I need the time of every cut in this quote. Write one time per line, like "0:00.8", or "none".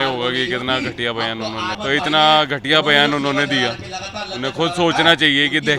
0:01.8